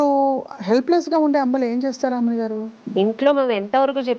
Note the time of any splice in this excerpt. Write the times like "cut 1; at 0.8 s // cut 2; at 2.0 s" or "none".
cut 1; at 2.8 s